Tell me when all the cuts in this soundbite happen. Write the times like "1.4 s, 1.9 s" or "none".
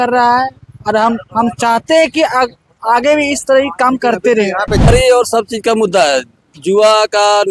4.8 s